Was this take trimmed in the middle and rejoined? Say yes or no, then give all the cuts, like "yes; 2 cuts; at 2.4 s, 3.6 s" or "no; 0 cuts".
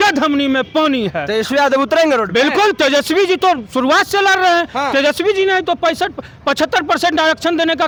no; 0 cuts